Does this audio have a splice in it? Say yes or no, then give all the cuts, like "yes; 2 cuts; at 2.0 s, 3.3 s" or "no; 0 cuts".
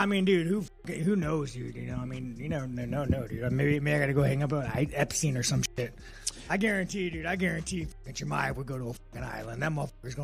no; 0 cuts